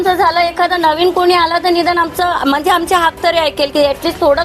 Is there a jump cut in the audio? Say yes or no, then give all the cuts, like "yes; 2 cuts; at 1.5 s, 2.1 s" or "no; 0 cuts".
no; 0 cuts